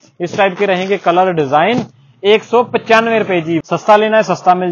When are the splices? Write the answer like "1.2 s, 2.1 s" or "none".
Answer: 3.6 s